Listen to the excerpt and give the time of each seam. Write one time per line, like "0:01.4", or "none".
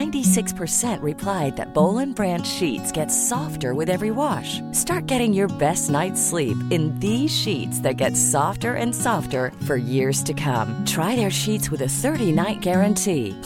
none